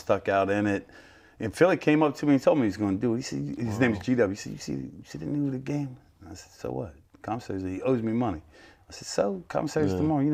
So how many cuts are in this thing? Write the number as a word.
zero